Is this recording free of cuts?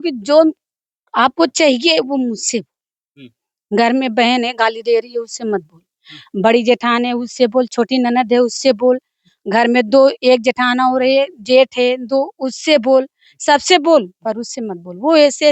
yes; 0 cuts

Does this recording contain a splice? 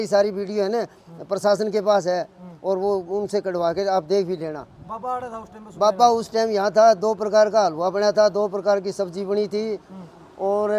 no; 0 cuts

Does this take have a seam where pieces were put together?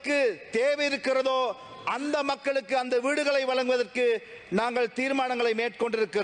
no; 0 cuts

